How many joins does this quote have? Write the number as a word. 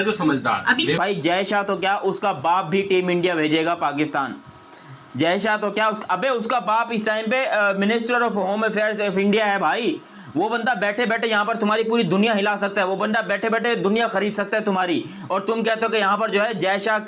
one